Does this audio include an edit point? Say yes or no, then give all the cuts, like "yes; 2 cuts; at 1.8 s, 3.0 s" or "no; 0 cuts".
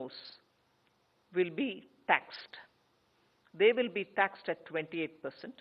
no; 0 cuts